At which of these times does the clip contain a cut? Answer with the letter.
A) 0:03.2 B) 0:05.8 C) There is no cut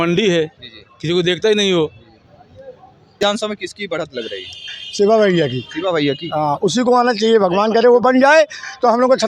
A